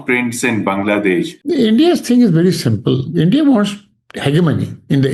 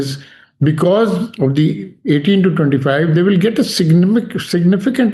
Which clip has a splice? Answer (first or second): first